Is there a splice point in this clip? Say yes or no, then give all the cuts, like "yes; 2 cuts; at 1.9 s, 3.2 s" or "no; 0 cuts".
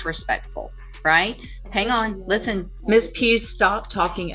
yes; 1 cut; at 2.7 s